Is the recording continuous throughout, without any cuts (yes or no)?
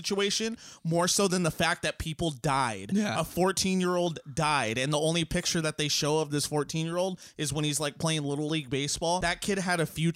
no